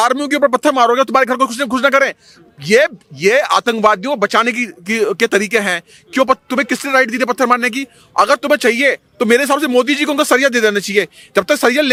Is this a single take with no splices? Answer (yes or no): yes